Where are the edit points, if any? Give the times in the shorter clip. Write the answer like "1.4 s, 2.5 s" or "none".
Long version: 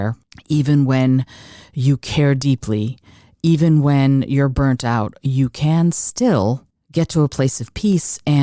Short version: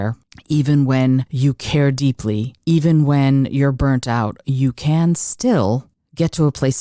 1.3 s, 2.5 s